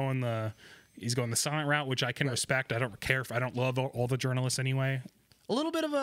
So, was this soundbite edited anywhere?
yes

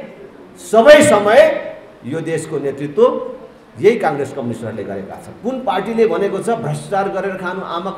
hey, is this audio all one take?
no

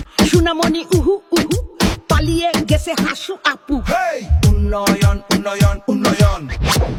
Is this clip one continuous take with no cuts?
yes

